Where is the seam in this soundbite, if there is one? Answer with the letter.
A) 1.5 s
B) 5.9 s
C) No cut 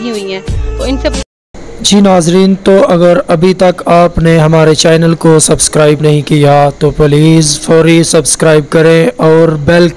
A